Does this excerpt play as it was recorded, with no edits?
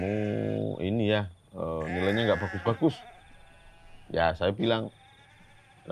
yes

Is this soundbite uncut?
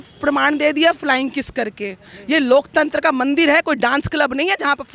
yes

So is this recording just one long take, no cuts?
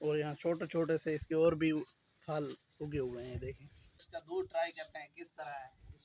no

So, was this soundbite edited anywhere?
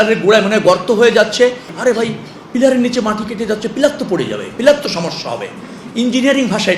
yes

